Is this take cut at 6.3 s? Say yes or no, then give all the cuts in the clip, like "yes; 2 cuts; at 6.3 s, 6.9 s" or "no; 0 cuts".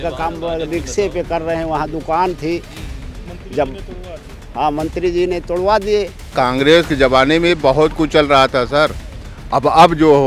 yes; 1 cut; at 6.3 s